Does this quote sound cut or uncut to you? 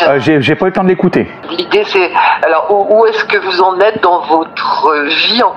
uncut